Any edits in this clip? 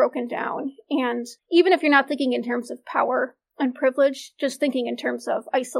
yes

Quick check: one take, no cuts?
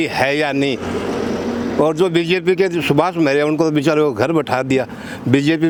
yes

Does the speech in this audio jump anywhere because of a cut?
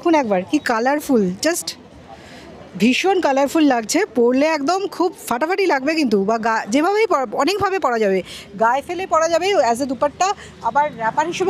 no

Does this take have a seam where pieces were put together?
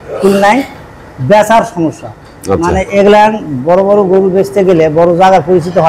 no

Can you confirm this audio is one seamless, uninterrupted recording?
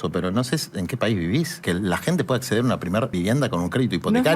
no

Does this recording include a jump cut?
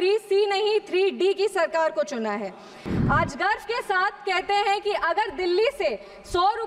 yes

